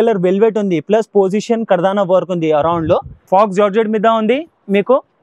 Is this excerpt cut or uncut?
cut